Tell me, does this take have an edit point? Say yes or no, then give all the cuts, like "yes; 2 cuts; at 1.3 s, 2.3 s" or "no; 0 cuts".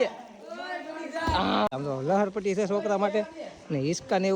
yes; 1 cut; at 1.7 s